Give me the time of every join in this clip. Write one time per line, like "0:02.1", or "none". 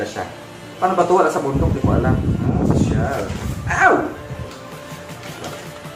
none